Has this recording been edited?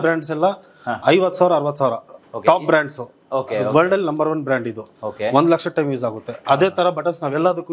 no; 0 cuts

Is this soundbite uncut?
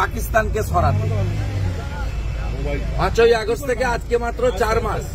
yes; 0 cuts

